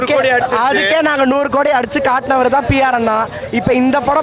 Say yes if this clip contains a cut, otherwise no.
no